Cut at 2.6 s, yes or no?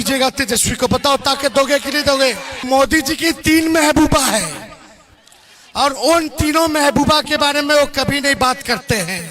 yes